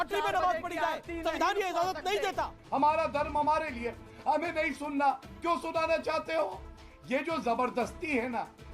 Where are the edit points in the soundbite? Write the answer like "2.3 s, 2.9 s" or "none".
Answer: 2.6 s